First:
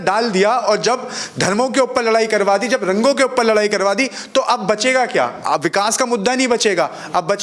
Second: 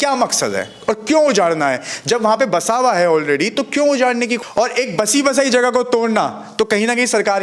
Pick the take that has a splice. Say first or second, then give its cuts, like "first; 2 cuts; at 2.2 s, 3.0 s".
second; 1 cut; at 4.3 s